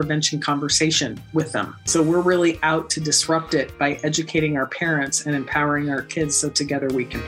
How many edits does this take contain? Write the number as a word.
one